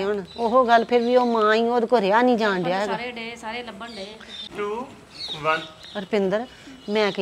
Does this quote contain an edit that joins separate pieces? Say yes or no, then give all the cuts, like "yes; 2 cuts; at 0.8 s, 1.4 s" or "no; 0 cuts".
no; 0 cuts